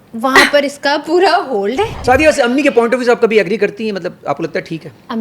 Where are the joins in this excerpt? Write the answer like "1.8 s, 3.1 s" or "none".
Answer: 2.0 s